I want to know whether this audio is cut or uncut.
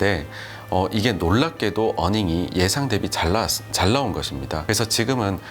cut